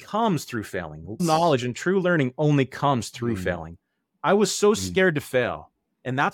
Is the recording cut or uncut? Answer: cut